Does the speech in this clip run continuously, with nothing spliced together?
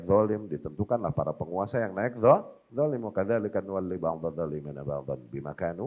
yes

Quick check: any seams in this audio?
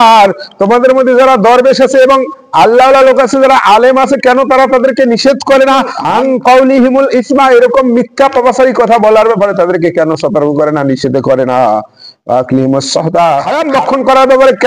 yes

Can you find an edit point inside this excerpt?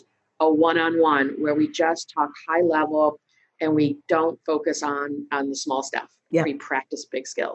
no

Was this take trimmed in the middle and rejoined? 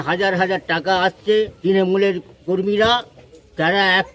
yes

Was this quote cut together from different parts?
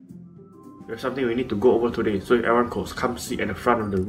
yes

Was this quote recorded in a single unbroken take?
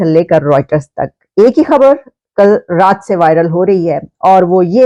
yes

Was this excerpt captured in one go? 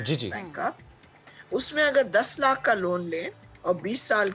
yes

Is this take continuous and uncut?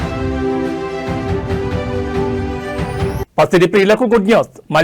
no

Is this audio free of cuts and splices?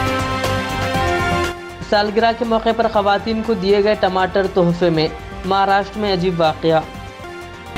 no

